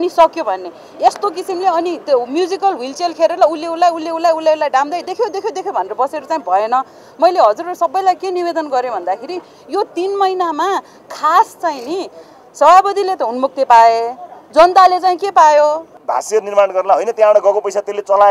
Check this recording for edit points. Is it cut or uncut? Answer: cut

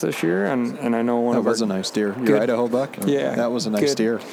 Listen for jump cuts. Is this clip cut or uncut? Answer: uncut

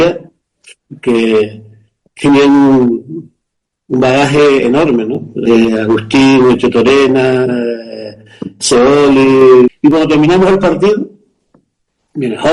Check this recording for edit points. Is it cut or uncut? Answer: cut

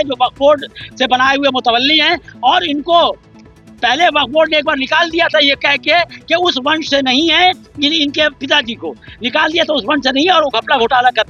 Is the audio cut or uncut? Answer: uncut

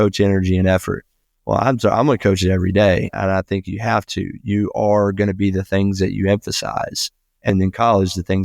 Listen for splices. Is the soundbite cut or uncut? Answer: cut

